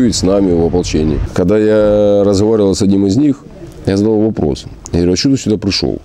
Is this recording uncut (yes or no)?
no